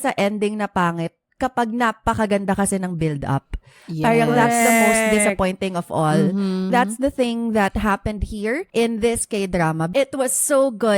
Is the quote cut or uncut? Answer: cut